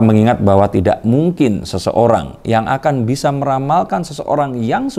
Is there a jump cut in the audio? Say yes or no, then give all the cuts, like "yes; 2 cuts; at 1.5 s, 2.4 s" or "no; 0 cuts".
no; 0 cuts